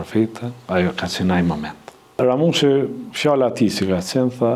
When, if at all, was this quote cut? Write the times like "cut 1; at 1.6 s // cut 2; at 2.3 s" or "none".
cut 1; at 2.2 s